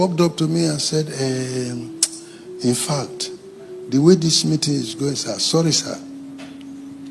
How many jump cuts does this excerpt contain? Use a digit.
0